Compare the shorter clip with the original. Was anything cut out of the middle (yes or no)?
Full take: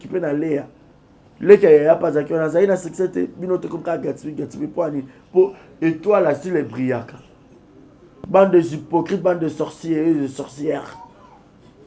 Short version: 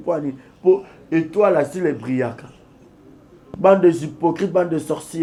no